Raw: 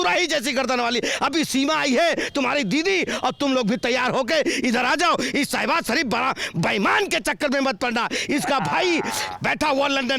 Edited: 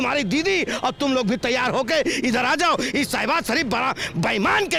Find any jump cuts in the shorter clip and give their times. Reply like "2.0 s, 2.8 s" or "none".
none